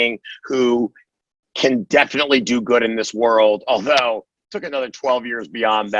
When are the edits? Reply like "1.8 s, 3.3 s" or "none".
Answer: none